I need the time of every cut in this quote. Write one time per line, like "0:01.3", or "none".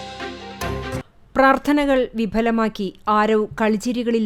none